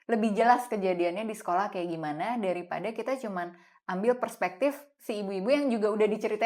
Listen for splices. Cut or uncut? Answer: uncut